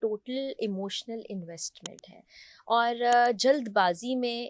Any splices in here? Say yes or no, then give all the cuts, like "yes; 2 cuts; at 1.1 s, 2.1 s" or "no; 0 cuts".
no; 0 cuts